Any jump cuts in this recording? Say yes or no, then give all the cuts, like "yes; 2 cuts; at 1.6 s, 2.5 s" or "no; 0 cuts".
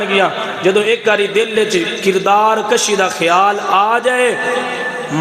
no; 0 cuts